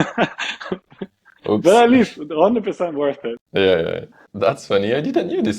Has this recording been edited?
yes; 2 cuts; at 3.3 s, 4.2 s

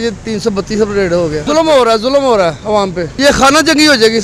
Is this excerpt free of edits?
yes; 0 cuts

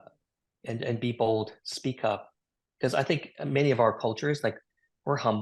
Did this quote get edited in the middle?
no; 0 cuts

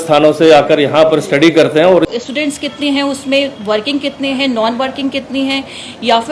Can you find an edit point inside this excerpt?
yes; 1 cut; at 2.1 s

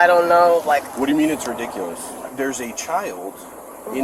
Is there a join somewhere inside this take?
yes; 1 cut; at 2.2 s

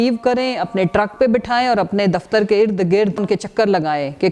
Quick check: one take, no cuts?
no; 1 cut; at 3.2 s

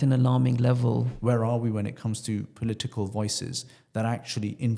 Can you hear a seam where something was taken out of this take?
yes; 1 cut; at 1.1 s

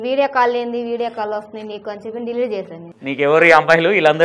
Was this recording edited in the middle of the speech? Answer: yes; 1 cut; at 2.9 s

